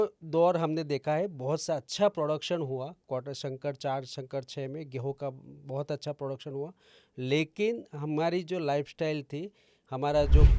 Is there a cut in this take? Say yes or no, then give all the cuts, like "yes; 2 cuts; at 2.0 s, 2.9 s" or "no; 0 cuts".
no; 0 cuts